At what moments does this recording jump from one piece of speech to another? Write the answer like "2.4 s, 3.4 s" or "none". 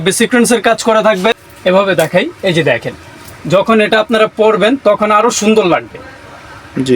1.4 s